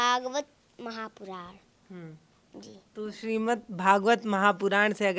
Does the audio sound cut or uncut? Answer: uncut